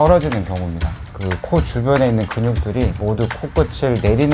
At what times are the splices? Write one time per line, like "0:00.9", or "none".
0:01.0